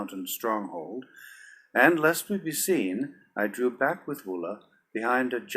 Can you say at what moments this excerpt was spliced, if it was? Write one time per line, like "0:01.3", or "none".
0:03.8

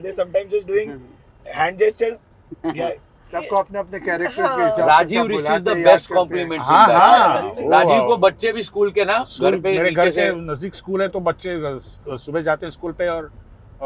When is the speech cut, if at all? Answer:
none

